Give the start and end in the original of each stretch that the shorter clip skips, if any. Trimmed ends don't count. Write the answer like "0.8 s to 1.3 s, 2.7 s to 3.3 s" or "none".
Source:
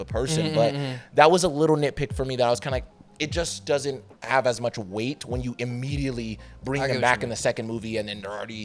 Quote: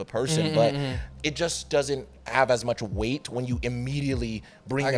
1.0 s to 3.0 s